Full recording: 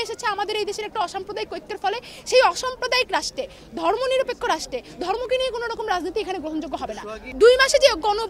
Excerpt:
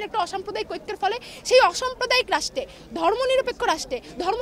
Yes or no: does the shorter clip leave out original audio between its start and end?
no